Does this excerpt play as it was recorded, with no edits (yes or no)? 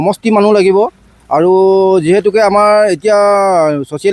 yes